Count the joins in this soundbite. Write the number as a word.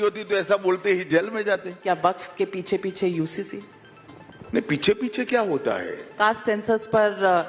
two